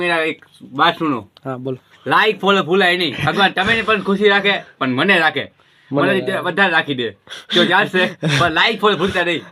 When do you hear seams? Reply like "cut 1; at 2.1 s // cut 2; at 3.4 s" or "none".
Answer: none

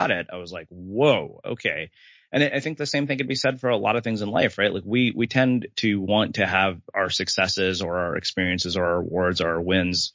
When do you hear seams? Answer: none

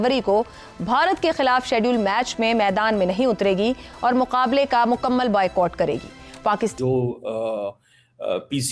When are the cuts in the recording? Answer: cut 1; at 6.7 s

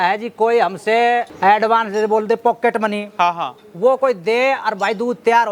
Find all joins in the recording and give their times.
cut 1; at 1.3 s

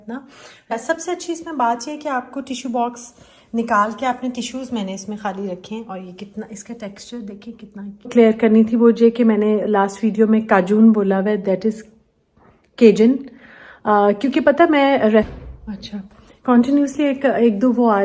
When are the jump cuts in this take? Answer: cut 1; at 0.7 s // cut 2; at 8.1 s // cut 3; at 15.3 s

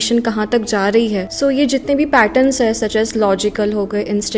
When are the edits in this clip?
cut 1; at 1.3 s

